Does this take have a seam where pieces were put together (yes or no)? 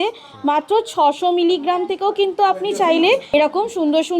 yes